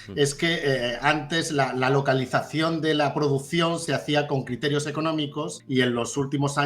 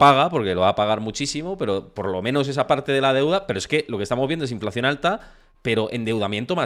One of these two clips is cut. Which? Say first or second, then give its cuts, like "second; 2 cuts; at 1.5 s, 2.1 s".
first; 1 cut; at 5.6 s